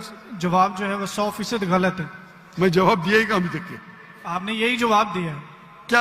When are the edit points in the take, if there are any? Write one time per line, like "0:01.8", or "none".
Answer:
none